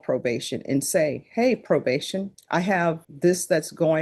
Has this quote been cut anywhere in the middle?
yes; 2 cuts; at 2.4 s, 3.1 s

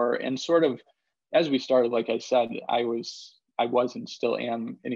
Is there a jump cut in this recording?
no; 0 cuts

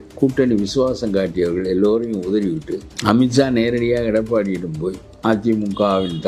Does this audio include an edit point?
no; 0 cuts

